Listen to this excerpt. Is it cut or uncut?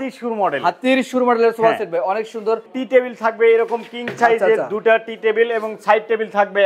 cut